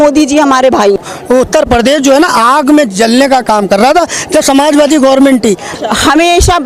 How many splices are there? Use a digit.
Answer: 2